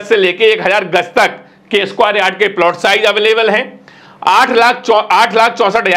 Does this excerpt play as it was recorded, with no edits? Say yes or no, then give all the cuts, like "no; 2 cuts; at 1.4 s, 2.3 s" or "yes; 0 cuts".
yes; 0 cuts